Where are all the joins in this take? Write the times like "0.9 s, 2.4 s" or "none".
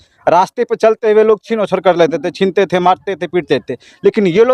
none

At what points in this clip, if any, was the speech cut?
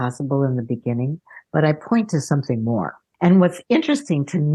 3.0 s

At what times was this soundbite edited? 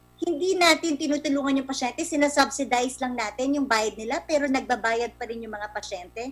none

